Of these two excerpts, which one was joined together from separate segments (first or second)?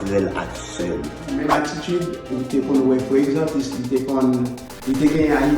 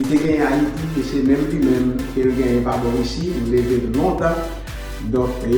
first